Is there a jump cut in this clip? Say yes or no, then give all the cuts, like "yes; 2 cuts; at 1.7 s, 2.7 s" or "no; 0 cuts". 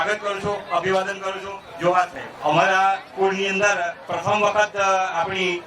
yes; 1 cut; at 2.2 s